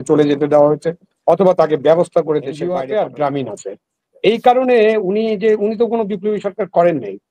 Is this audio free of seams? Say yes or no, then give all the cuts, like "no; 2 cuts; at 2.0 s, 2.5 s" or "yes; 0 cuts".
no; 1 cut; at 2.6 s